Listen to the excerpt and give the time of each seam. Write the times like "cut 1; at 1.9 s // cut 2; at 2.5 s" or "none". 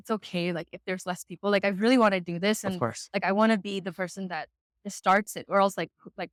none